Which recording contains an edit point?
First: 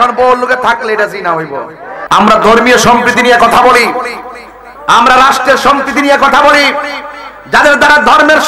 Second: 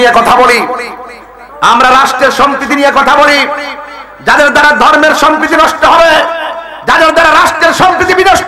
first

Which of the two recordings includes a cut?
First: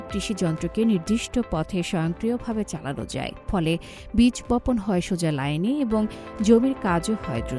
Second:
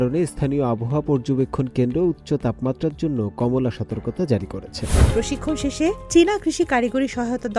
second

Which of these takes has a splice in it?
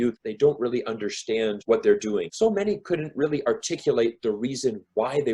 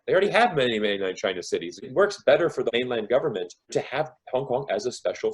first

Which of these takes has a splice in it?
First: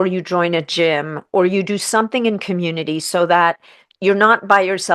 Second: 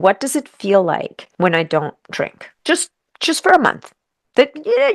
second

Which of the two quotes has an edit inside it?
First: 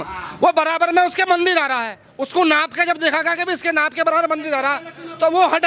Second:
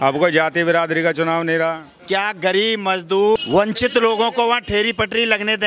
second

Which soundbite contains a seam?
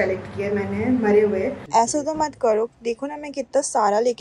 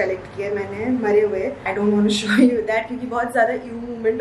first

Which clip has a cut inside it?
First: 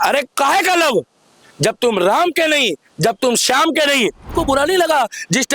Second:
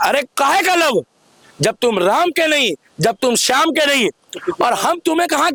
first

